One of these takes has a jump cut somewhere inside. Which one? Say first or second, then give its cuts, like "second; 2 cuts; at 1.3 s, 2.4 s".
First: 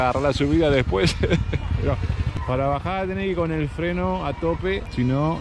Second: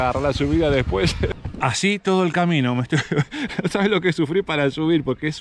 second; 1 cut; at 1.3 s